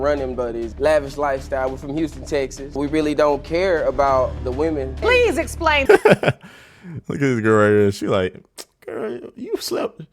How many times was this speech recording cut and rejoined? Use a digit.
1